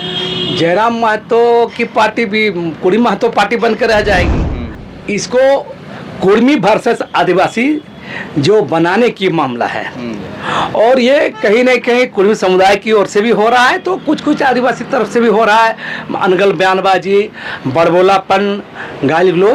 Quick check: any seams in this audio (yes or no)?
yes